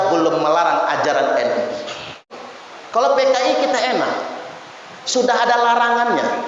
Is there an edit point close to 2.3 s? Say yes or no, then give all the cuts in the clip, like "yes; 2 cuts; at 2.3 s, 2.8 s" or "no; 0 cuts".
yes; 1 cut; at 2.3 s